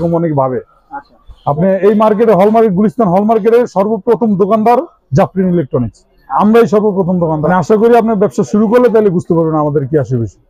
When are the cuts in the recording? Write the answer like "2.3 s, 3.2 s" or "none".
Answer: 7.4 s

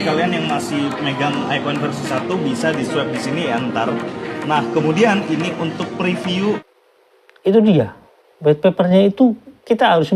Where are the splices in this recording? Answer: 6.6 s

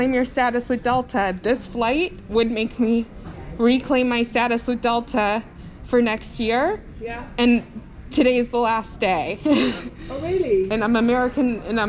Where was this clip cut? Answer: 10.7 s

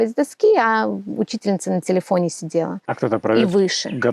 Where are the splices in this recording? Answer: 2.8 s

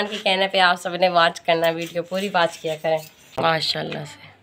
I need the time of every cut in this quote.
3.4 s

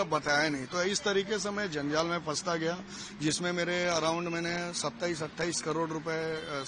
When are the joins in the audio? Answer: none

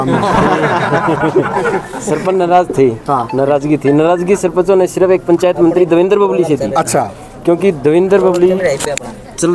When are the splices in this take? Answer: none

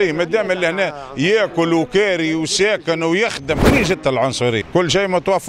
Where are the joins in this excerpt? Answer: 3.6 s, 4.7 s

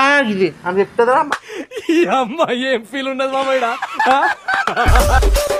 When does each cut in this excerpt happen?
1.2 s

